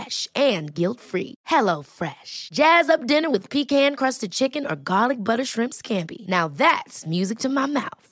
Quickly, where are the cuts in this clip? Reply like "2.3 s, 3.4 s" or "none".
none